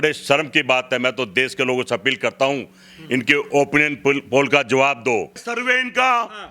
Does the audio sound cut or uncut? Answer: cut